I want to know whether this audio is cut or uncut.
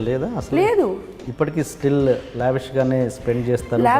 cut